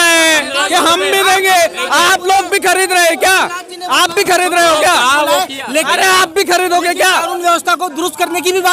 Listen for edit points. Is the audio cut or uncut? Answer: uncut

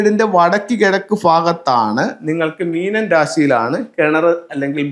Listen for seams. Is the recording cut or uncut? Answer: uncut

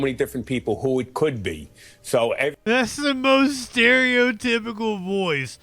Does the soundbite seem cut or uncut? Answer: uncut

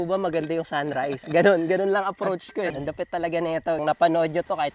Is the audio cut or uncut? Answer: cut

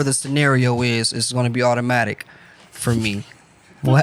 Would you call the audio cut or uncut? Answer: uncut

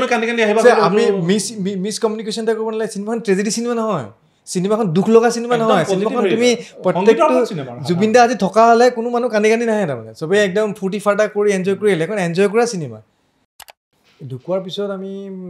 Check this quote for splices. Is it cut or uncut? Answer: cut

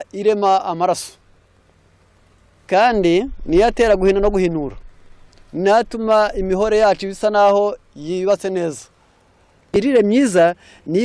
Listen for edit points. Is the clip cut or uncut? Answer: cut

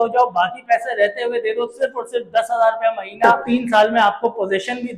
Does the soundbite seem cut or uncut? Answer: cut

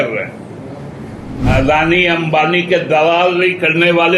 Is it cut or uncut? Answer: cut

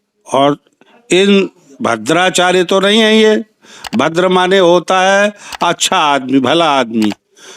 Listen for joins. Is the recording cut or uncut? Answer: uncut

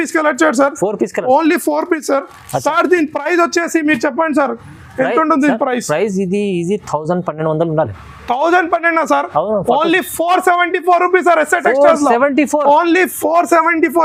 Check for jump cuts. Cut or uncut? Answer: uncut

